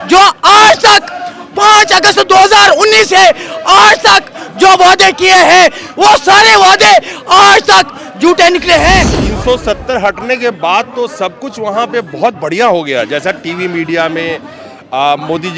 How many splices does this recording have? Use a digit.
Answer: 1